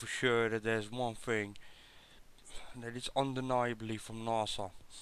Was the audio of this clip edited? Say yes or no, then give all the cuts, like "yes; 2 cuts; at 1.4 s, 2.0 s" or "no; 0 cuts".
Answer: yes; 1 cut; at 4.1 s